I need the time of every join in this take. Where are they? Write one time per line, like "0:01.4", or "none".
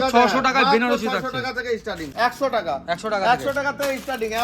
0:02.1